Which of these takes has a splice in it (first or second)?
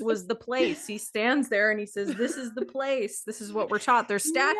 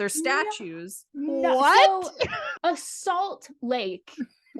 second